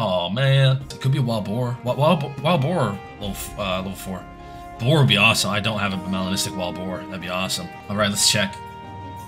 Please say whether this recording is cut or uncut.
cut